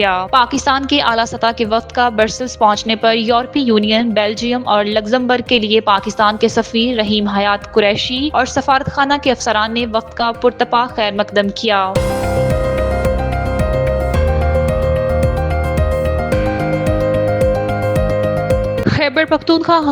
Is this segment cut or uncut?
cut